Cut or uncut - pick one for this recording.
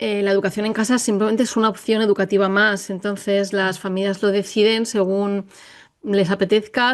uncut